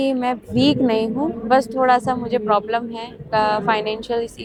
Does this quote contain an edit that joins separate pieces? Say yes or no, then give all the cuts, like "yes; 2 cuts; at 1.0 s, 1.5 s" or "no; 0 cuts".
no; 0 cuts